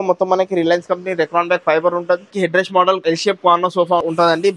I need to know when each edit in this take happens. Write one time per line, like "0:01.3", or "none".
0:02.3